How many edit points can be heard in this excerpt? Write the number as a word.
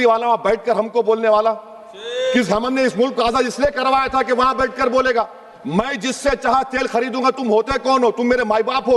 zero